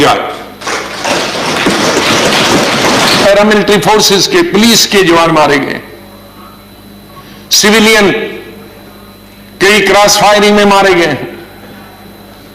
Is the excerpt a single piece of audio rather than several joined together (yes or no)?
no